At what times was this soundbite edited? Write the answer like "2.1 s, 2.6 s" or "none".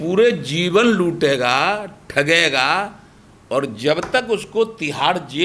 none

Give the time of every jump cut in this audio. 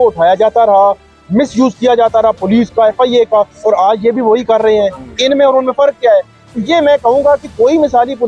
none

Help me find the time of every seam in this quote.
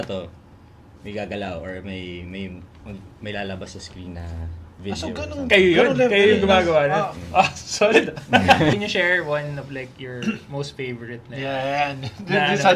8.7 s

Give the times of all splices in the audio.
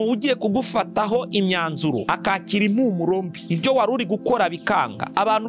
none

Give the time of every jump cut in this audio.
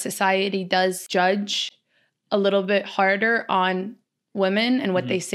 1.0 s

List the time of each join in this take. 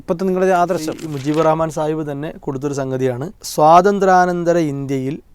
1.0 s, 3.4 s

